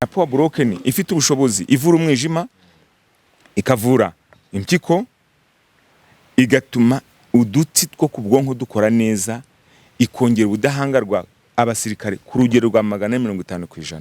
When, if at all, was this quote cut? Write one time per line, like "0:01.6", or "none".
none